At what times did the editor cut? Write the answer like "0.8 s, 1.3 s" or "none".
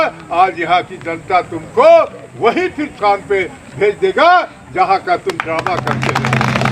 3.0 s